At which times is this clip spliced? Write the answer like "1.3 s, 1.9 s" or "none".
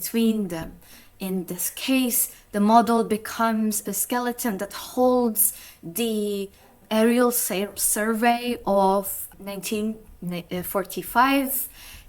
3.9 s, 6.8 s, 9.2 s